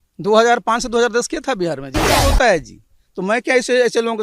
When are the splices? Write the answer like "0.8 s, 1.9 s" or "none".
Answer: 2.2 s

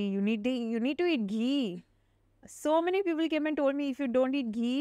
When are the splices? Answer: none

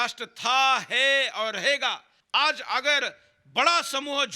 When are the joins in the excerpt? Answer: 2.1 s

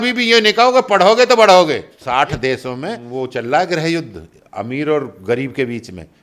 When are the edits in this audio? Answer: 1.9 s, 3.0 s

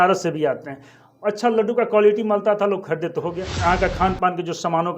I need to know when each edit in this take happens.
3.4 s

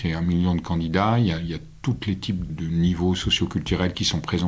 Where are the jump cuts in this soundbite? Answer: 2.5 s

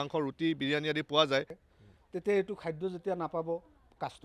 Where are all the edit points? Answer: 1.6 s

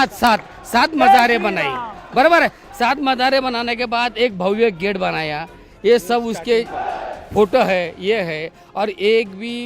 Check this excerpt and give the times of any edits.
none

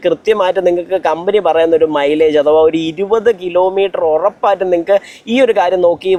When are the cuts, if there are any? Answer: none

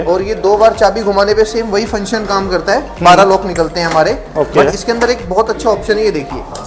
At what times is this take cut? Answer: none

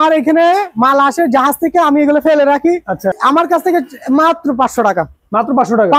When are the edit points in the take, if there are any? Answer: 3.1 s

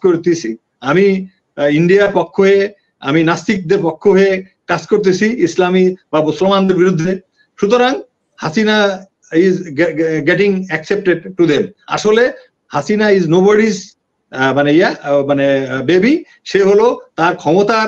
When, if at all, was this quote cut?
none

